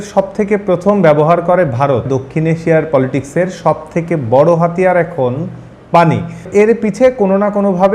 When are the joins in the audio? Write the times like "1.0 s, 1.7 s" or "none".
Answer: 2.1 s, 6.5 s